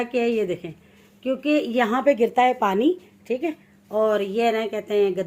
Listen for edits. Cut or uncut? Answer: uncut